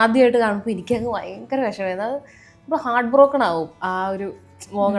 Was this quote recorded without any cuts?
yes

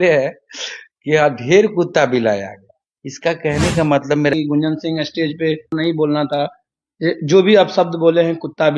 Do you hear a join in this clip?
yes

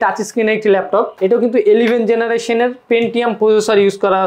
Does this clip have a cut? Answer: yes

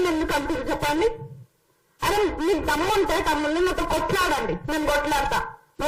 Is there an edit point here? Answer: no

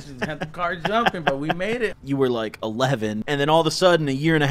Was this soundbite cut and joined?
yes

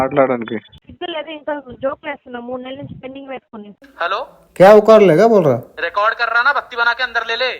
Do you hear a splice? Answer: yes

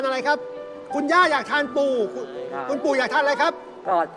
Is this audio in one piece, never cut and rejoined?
yes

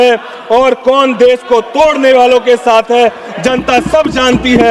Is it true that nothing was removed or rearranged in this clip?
yes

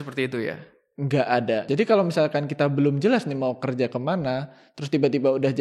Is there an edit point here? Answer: yes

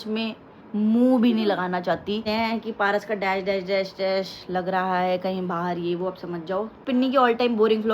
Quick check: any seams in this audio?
yes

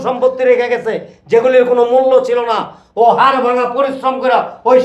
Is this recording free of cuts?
yes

